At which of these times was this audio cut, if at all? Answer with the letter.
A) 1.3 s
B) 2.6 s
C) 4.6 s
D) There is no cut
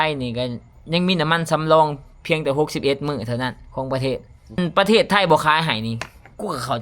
C